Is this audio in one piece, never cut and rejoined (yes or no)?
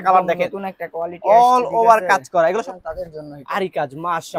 no